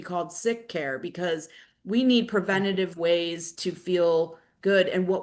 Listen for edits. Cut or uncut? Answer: uncut